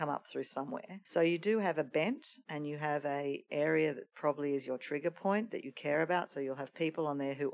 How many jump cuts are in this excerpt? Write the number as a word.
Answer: one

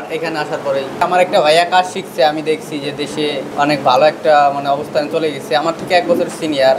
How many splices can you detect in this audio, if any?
two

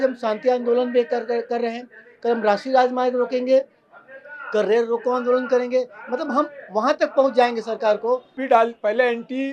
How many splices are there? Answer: one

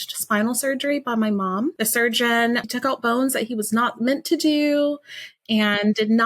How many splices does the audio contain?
one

